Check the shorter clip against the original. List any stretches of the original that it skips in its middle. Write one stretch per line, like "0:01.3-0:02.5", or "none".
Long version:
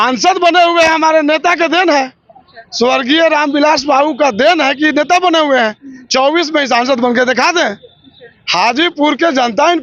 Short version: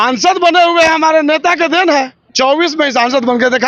0:02.2-0:06.0